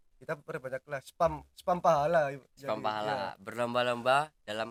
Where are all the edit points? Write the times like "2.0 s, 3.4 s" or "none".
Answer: none